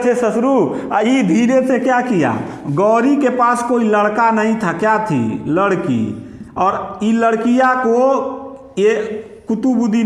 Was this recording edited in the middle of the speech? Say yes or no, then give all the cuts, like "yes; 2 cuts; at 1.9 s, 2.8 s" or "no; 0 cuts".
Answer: no; 0 cuts